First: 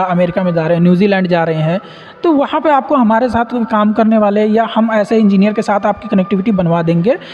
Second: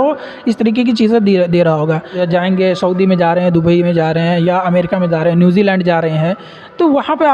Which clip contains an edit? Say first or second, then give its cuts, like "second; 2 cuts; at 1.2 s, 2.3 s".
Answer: second; 1 cut; at 2.2 s